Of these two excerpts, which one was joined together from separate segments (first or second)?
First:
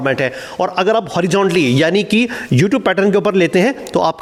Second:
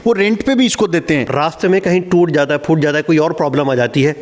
second